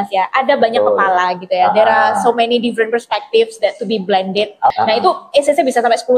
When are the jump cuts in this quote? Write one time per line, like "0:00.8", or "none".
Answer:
0:04.7